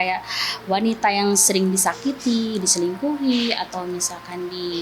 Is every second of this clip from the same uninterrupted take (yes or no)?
yes